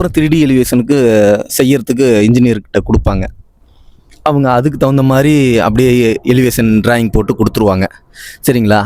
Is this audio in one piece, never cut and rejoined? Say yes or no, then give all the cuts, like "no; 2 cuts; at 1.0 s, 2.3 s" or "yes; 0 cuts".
yes; 0 cuts